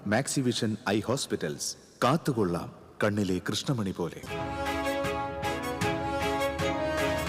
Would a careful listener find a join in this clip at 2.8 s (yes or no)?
no